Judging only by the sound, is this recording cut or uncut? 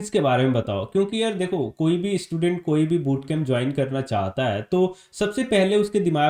uncut